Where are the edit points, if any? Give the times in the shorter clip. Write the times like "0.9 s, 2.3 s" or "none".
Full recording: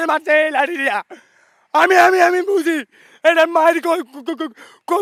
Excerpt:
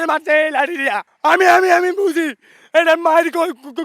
1.1 s